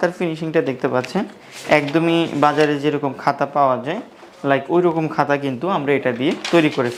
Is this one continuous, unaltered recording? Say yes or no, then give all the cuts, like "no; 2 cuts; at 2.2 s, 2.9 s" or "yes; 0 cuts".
yes; 0 cuts